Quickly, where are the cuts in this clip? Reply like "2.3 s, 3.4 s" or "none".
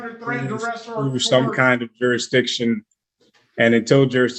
none